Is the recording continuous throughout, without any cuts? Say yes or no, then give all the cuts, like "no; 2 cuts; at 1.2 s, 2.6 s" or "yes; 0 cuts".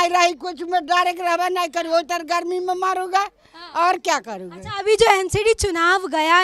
yes; 0 cuts